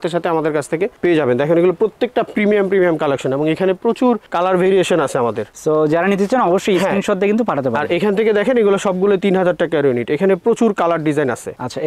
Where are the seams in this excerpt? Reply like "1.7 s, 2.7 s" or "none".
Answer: none